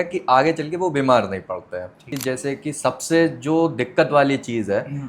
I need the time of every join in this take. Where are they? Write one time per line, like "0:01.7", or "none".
0:02.1